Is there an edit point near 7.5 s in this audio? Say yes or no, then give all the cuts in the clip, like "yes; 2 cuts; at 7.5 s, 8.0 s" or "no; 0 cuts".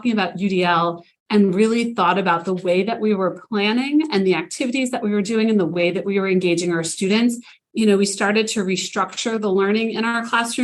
yes; 2 cuts; at 1.1 s, 7.5 s